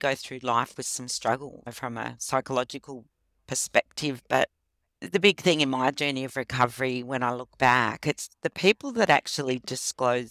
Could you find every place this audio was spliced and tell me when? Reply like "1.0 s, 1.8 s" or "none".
1.6 s, 5.0 s

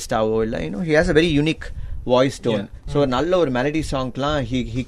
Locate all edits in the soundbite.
none

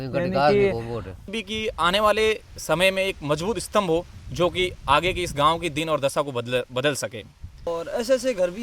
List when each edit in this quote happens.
1.3 s, 7.7 s

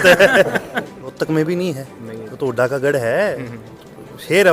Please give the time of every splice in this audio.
1.0 s

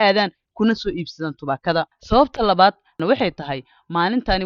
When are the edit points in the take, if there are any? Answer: none

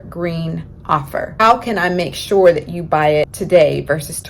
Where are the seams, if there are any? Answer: 1.4 s, 3.3 s

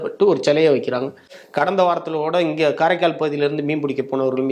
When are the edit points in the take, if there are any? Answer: 1.4 s

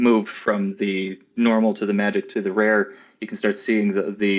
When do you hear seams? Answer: none

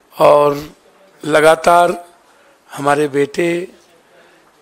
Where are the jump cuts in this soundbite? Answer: none

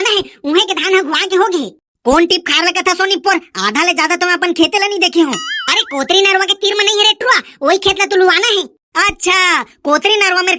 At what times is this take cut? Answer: none

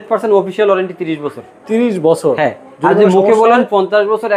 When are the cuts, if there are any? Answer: none

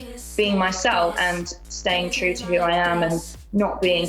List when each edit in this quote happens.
1.2 s

